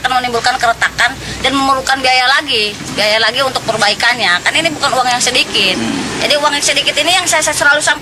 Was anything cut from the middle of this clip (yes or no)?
yes